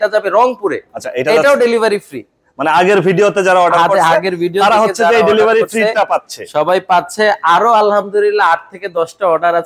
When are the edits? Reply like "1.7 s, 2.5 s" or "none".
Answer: none